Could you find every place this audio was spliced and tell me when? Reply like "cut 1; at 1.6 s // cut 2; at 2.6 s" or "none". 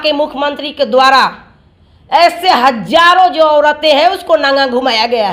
none